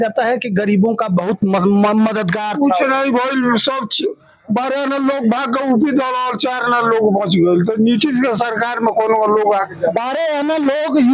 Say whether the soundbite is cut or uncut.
uncut